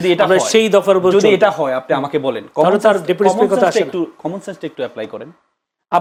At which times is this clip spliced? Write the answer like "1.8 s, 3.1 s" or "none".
none